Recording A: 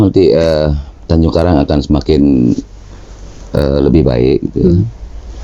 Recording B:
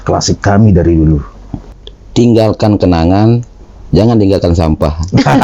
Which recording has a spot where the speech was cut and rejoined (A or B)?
B